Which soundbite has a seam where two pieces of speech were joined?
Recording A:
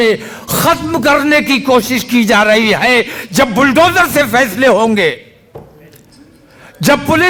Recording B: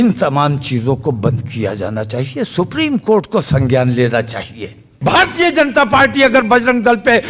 B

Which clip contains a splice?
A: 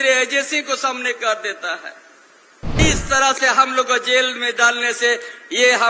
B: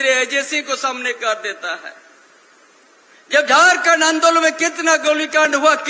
A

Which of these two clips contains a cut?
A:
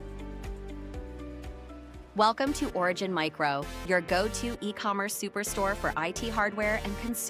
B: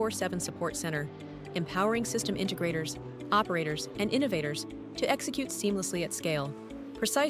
A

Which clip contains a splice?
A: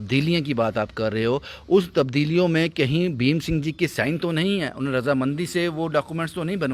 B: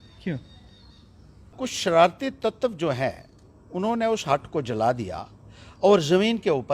B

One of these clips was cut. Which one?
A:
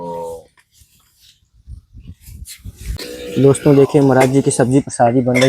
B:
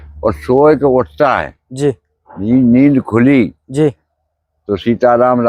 A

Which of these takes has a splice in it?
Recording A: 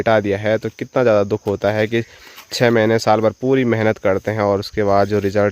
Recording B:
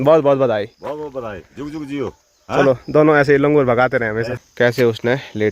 B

